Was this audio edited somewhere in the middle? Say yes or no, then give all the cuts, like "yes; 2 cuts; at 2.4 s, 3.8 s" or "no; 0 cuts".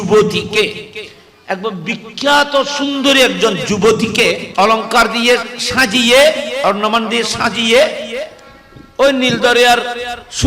yes; 1 cut; at 4.4 s